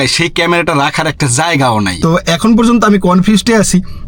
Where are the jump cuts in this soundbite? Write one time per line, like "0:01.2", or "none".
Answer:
0:01.9